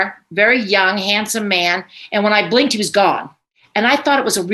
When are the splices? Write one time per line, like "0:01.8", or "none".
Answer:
0:03.6